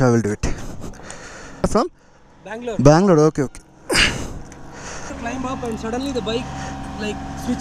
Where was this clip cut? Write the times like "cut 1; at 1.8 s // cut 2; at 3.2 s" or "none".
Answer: cut 1; at 1.6 s // cut 2; at 5.1 s